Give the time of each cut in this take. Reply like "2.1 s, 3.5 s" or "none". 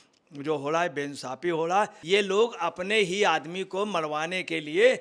2.0 s

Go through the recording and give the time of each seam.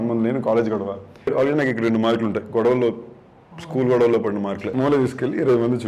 1.3 s, 4.7 s

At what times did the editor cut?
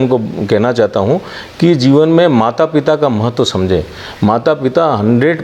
none

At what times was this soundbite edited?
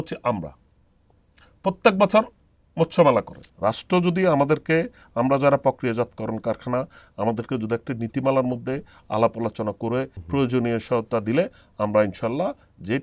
3.4 s, 10.2 s

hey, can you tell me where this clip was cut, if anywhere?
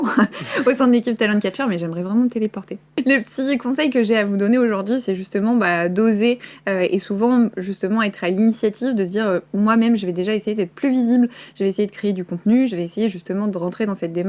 2.9 s

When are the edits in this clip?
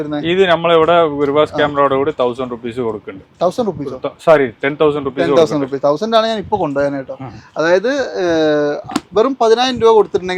none

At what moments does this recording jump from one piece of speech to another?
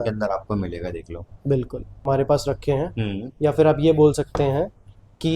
2.1 s

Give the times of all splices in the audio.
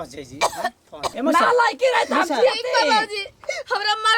1.1 s

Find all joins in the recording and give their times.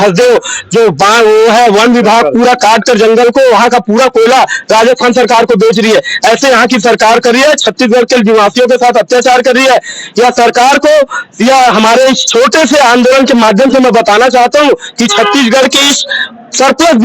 none

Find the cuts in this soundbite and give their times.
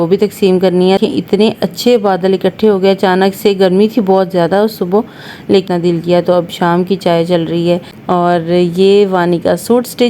1.0 s, 5.7 s, 7.9 s

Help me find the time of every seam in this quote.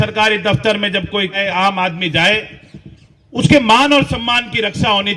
1.4 s

